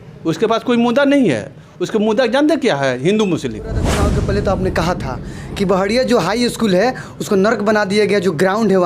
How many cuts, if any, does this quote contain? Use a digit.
1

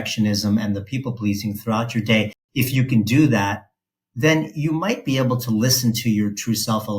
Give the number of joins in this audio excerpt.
1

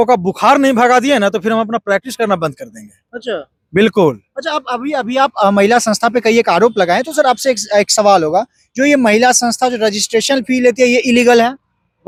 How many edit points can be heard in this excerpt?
0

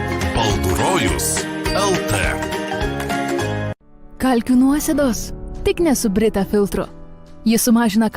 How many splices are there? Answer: 1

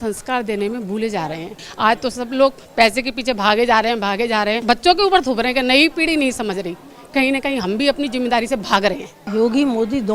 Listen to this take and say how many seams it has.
3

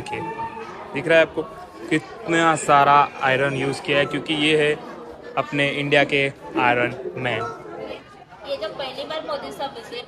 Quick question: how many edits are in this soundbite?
1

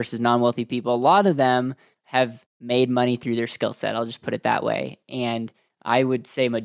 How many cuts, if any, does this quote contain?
1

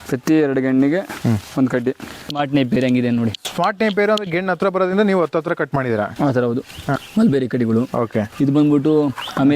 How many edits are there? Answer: 2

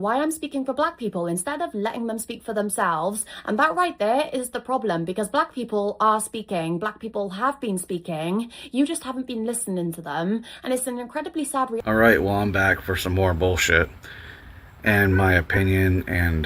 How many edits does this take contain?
1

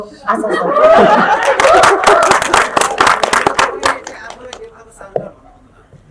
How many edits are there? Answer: 0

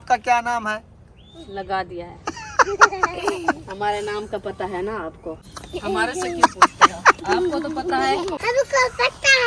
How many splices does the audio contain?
2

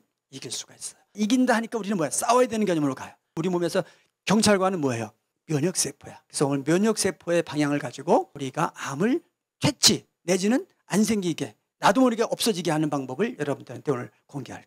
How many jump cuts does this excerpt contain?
2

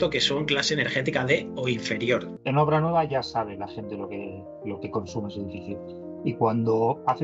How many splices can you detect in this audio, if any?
1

